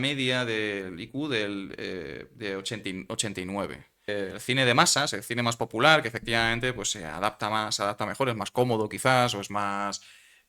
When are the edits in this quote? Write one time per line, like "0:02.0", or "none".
0:04.3